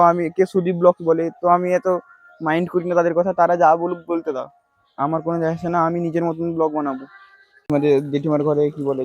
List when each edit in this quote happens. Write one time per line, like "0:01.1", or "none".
0:07.7